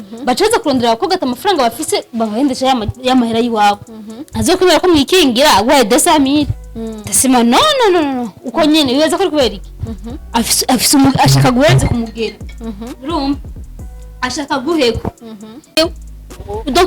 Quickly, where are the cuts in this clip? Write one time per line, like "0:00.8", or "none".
0:15.8